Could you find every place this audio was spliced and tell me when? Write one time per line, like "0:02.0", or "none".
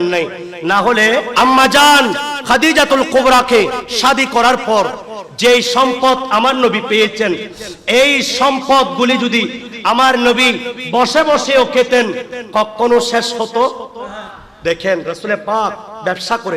0:01.3